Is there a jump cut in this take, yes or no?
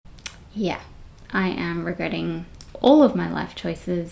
no